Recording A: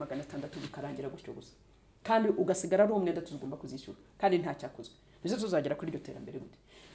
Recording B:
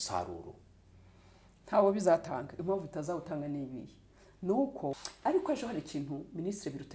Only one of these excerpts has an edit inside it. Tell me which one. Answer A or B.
B